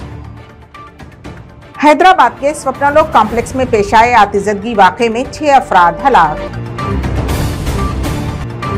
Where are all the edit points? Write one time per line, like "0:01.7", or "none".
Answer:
0:01.1